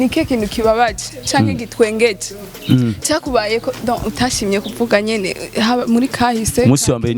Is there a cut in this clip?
no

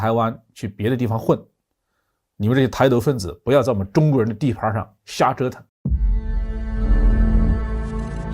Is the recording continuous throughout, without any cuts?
no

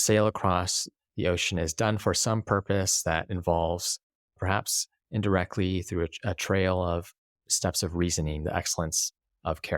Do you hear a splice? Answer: no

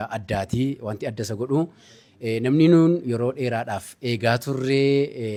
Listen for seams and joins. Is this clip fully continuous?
yes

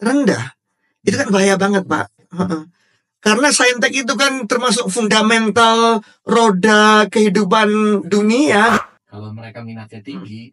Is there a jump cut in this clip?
yes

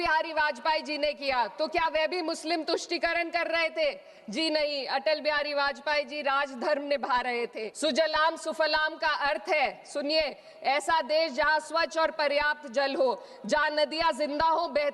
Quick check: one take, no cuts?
no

